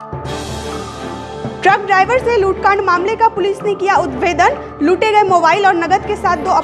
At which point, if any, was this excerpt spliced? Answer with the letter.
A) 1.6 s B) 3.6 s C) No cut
A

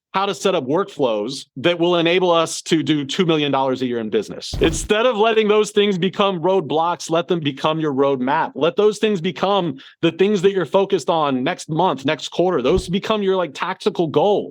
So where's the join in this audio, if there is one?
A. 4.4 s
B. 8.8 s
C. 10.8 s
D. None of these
A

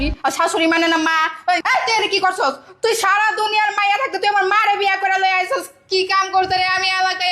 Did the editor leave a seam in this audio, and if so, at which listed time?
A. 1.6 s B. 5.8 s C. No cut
A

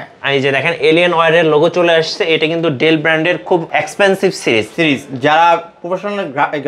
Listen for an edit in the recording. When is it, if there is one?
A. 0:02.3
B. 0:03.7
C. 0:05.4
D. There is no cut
B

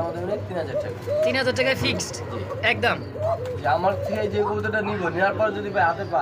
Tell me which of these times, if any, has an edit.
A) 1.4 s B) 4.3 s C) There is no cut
C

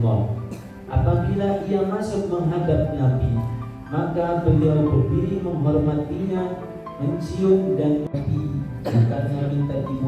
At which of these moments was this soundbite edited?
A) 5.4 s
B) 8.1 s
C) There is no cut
B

